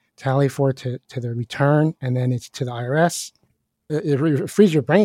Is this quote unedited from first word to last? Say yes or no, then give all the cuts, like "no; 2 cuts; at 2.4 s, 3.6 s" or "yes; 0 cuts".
no; 1 cut; at 3.8 s